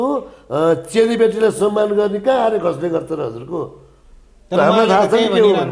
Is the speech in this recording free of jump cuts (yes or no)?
yes